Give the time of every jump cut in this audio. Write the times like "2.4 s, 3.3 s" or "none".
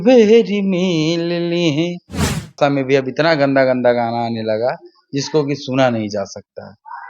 2.6 s